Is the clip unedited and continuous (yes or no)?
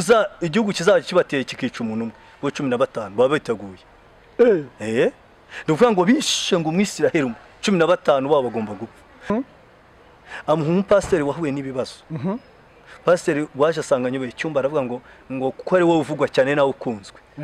no